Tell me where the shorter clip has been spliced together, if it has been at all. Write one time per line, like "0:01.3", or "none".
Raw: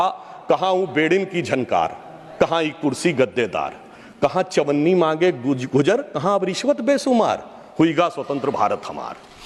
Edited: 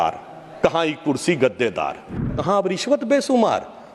0:02.3